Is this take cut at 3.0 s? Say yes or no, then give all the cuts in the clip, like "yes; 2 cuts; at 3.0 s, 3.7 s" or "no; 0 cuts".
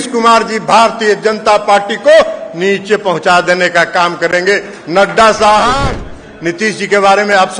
no; 1 cut; at 5.8 s